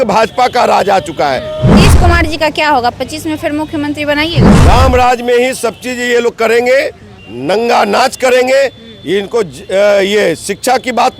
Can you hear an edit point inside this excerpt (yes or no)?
yes